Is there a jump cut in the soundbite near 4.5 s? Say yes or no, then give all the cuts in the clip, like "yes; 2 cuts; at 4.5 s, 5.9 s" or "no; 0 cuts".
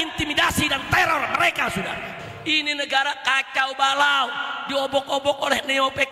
no; 1 cut; at 2.3 s